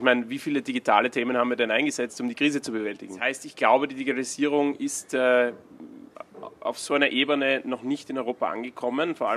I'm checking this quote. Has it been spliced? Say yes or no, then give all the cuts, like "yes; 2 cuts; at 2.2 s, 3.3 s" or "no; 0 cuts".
yes; 1 cut; at 3.5 s